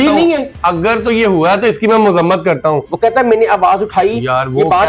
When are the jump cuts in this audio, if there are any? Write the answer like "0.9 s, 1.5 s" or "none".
2.9 s